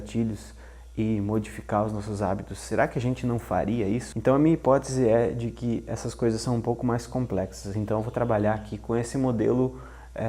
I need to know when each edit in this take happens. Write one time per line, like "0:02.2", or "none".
0:04.1

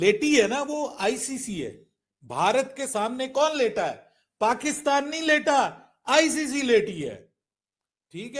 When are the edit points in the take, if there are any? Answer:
none

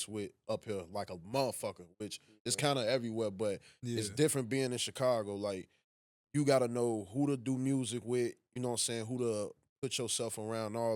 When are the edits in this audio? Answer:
none

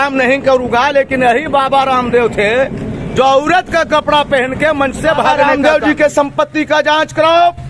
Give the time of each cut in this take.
0:05.3

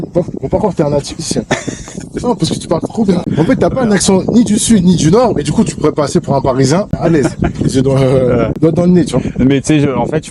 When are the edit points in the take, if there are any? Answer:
0:03.2
0:06.9
0:08.5

